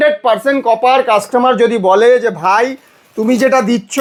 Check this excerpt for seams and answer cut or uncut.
uncut